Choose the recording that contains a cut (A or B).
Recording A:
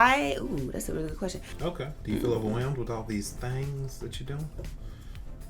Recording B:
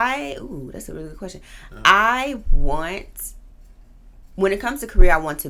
A